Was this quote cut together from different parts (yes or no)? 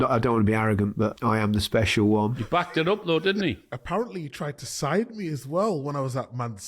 yes